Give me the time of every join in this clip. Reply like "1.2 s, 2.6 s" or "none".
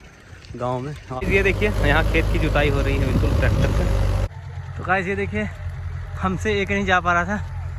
1.2 s, 4.3 s